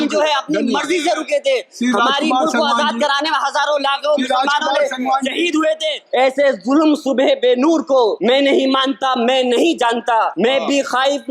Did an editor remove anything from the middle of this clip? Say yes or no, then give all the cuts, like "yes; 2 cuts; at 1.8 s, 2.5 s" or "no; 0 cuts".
yes; 3 cuts; at 6.0 s, 8.2 s, 10.3 s